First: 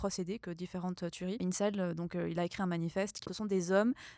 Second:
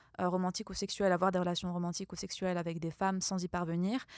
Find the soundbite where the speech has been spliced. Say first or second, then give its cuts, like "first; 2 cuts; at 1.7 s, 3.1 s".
first; 2 cuts; at 1.4 s, 3.2 s